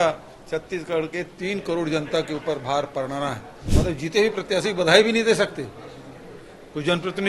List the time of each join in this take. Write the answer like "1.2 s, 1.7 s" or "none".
3.5 s